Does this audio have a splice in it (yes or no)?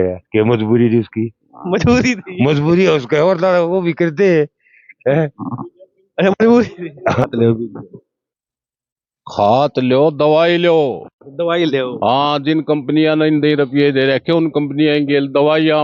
yes